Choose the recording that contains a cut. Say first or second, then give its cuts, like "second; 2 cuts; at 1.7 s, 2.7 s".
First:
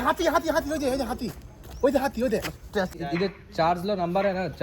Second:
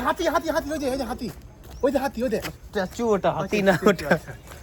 first; 1 cut; at 2.9 s